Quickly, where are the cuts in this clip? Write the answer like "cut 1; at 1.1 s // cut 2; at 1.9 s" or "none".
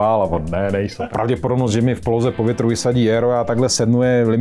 cut 1; at 1.0 s